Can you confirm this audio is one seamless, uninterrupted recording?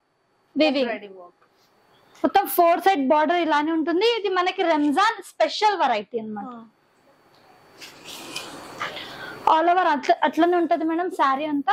yes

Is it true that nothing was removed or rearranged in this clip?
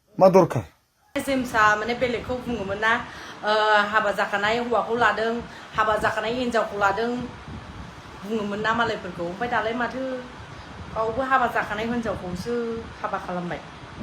no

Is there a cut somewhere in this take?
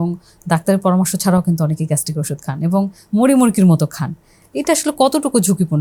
no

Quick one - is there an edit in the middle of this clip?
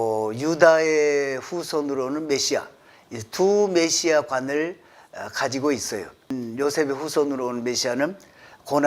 yes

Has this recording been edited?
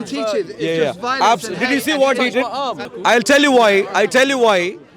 yes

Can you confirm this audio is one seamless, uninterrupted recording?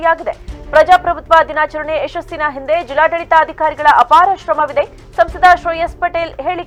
yes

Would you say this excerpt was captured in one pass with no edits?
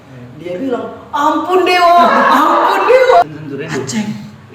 no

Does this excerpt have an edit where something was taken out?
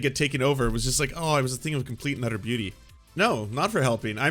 yes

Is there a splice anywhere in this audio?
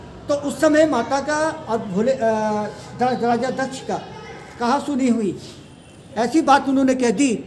no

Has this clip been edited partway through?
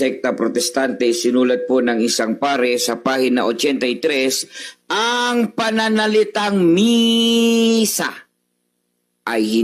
no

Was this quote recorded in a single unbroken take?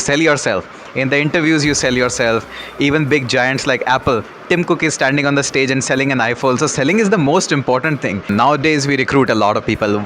no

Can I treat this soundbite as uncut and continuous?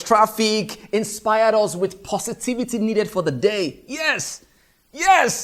yes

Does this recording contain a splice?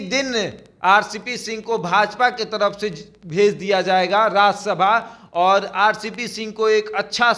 no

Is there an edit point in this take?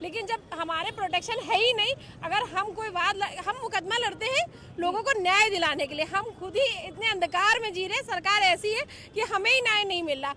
no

